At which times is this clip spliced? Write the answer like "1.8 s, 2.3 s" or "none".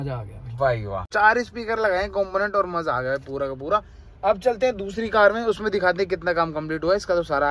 none

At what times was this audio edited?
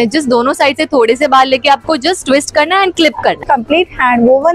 3.4 s

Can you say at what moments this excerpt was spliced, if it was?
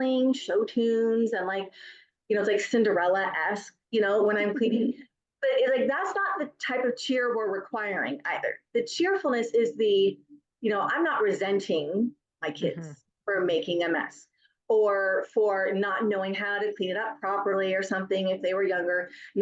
none

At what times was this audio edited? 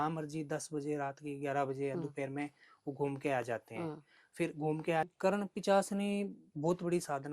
5.1 s

